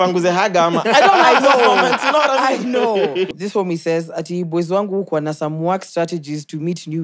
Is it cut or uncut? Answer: cut